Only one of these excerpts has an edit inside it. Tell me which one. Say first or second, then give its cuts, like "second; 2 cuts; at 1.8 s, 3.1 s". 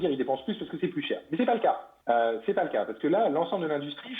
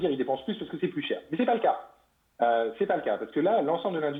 first; 1 cut; at 1.9 s